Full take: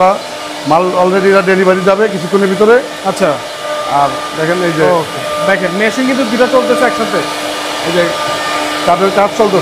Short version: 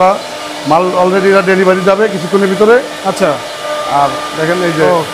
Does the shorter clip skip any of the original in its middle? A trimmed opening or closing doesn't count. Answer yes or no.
no